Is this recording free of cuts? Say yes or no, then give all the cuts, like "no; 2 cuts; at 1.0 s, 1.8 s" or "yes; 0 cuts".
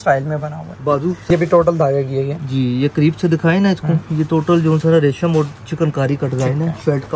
no; 1 cut; at 1.2 s